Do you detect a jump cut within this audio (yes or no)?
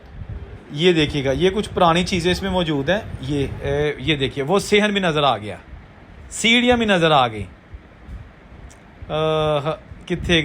yes